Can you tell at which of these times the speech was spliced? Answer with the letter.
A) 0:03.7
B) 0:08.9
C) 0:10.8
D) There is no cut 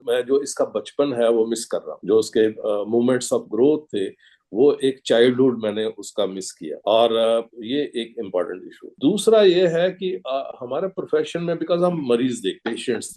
D